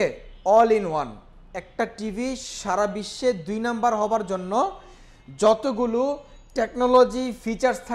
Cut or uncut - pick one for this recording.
uncut